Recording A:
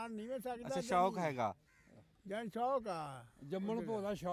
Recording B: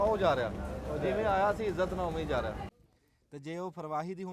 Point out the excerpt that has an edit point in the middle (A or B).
B